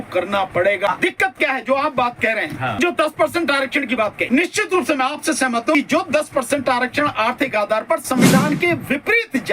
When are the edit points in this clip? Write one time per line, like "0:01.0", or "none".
0:00.9
0:02.7
0:04.2
0:05.7